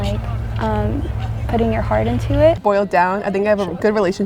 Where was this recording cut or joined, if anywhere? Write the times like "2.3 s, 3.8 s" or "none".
2.6 s